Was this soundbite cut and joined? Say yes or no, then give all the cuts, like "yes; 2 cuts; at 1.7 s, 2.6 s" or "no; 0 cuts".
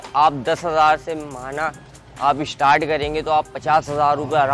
no; 0 cuts